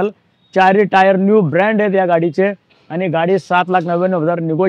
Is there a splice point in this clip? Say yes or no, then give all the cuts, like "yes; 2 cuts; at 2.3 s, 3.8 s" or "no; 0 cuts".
no; 0 cuts